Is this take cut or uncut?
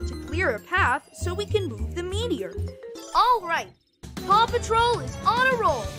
uncut